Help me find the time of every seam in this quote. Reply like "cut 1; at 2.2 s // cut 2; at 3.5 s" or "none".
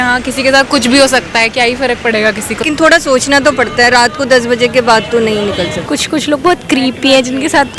cut 1; at 2.6 s // cut 2; at 5.9 s